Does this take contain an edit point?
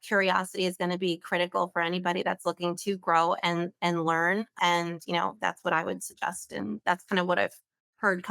yes; 1 cut; at 4.5 s

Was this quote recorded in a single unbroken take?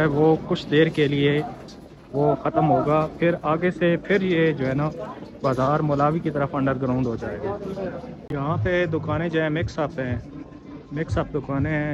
no; 1 cut; at 8.1 s

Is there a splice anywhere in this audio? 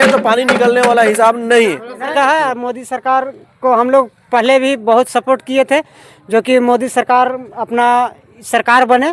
no; 0 cuts

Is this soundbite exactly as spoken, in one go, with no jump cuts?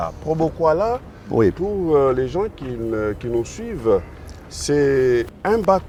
yes; 0 cuts

